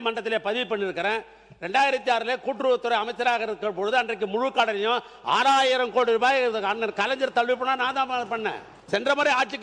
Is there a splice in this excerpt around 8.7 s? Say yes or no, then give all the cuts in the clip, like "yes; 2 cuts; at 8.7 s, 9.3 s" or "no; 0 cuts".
yes; 1 cut; at 8.7 s